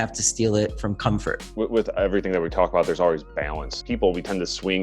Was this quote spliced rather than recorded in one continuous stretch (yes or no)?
yes